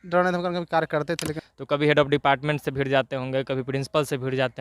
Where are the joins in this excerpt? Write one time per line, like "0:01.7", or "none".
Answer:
0:01.3